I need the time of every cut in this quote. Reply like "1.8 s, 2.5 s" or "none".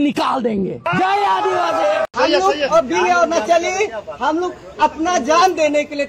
2.1 s